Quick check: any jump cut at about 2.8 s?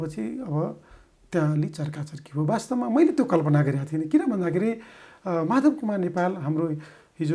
no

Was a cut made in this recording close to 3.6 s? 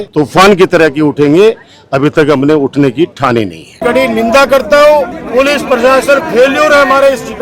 yes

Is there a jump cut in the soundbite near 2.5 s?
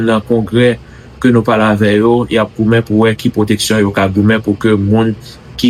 no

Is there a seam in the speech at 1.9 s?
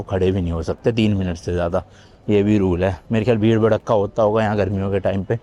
no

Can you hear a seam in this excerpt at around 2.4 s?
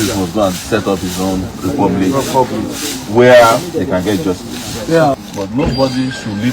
no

